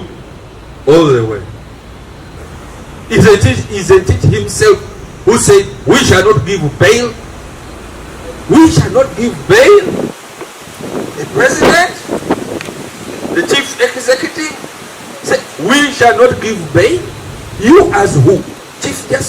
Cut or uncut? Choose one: cut